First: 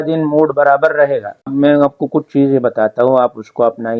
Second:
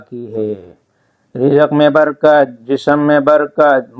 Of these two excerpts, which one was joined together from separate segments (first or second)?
first